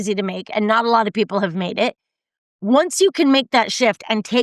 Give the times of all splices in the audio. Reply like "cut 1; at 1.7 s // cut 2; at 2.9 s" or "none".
none